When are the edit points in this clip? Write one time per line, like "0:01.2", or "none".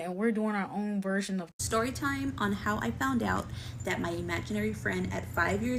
0:01.5